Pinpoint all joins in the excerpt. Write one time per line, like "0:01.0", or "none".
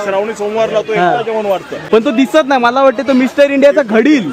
0:01.7